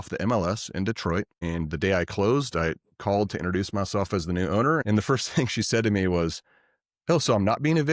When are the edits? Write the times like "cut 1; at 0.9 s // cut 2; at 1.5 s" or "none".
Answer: cut 1; at 1.3 s // cut 2; at 4.8 s